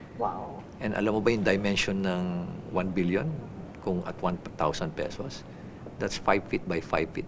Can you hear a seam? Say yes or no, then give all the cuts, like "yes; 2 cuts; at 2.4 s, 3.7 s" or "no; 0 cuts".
no; 0 cuts